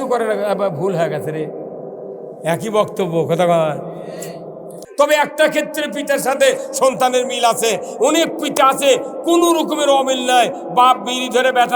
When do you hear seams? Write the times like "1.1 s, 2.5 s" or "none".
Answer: 4.8 s